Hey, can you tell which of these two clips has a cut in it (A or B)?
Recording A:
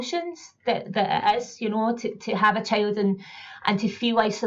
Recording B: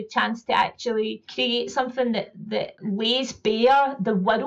B